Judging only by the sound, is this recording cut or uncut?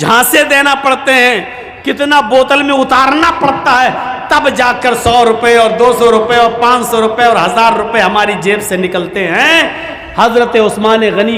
uncut